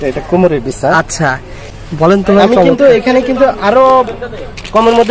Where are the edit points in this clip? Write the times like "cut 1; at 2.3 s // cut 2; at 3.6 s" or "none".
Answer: cut 1; at 1.6 s